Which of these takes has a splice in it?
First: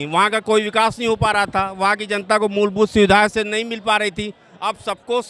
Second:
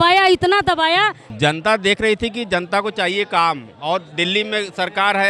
second; 1 cut; at 1.2 s

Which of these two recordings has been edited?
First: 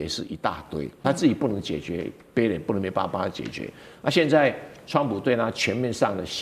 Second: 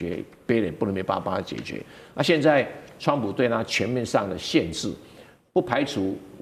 first; 1 cut; at 1.0 s

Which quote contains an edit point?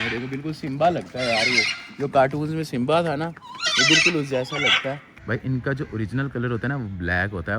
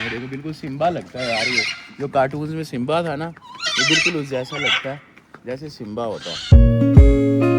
first; 1 cut; at 5.1 s

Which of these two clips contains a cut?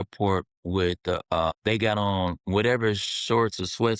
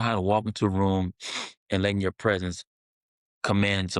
first; 2 cuts; at 1.5 s, 2.4 s

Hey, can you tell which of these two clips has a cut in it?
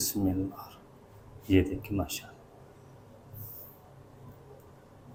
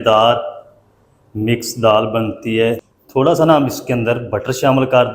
second; 1 cut; at 2.9 s

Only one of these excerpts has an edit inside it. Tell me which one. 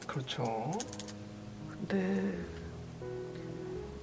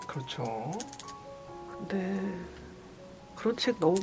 second; 1 cut; at 3.0 s

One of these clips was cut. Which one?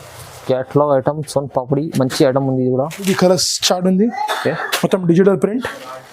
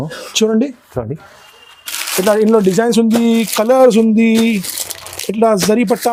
first; 1 cut; at 3.1 s

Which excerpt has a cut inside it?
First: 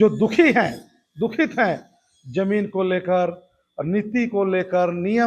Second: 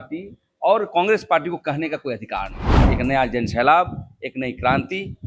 second; 1 cut; at 2.8 s

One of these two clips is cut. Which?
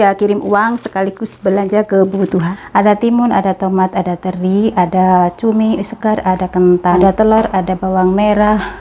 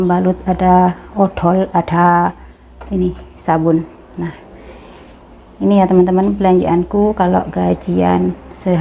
first; 2 cuts; at 2.5 s, 7.0 s

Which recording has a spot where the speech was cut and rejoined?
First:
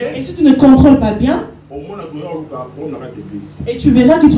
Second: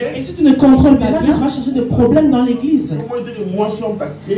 second; 1 cut; at 1.1 s

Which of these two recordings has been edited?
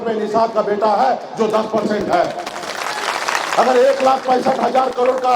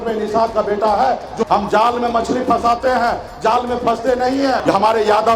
second; 2 cuts; at 1.5 s, 4.6 s

